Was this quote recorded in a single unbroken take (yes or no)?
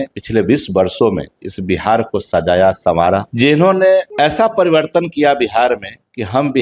no